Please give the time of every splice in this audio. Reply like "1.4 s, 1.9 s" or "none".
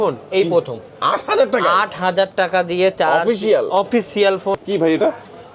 4.6 s